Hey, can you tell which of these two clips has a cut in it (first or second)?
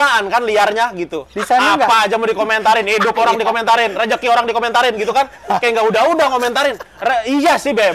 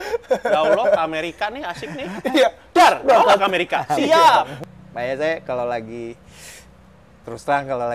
second